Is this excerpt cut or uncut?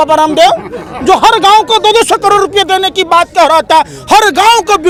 uncut